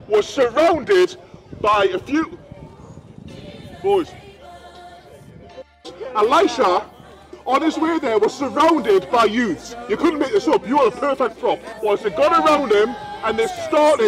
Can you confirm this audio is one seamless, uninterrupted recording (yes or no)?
no